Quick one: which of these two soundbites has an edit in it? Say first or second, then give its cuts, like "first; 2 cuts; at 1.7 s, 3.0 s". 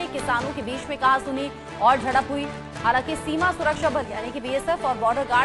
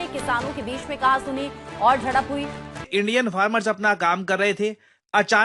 second; 1 cut; at 2.8 s